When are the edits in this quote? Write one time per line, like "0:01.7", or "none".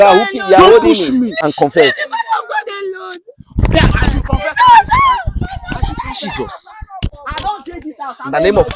0:01.4
0:07.1